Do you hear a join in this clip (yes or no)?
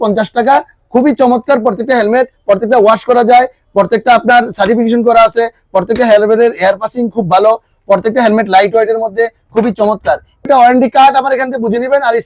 yes